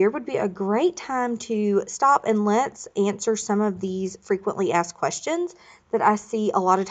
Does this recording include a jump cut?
no; 0 cuts

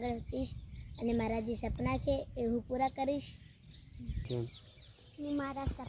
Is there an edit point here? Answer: yes; 1 cut; at 4.3 s

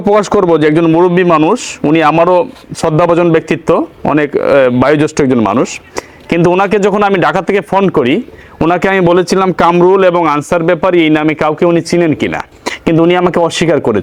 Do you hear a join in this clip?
no; 0 cuts

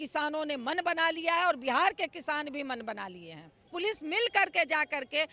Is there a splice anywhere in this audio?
yes; 1 cut; at 3.7 s

